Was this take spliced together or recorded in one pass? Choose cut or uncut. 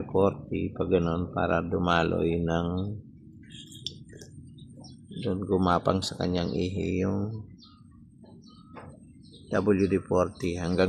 uncut